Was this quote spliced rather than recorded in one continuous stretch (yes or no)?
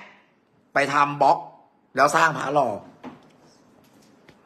yes